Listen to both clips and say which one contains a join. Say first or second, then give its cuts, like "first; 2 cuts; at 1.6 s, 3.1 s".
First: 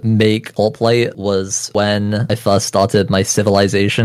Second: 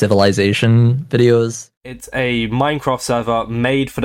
second; 1 cut; at 1.7 s